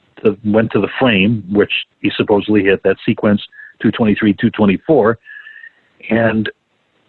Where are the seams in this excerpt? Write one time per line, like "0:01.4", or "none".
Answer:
none